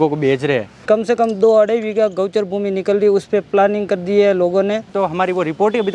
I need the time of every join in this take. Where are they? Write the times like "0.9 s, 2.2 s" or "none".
0.8 s, 4.9 s